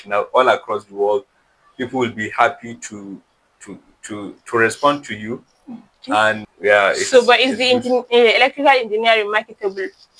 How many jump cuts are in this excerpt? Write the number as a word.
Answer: one